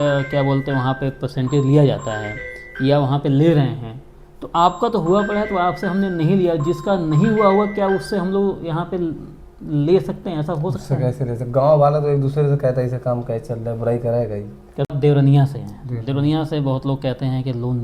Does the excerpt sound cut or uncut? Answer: cut